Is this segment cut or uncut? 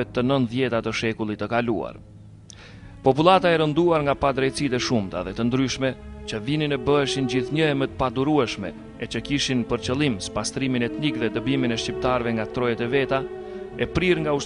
cut